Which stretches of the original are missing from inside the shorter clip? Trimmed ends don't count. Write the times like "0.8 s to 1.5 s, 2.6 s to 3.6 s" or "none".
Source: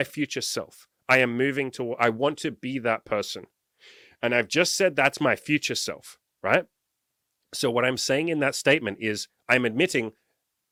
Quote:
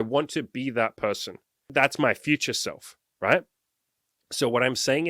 3.8 s to 4.9 s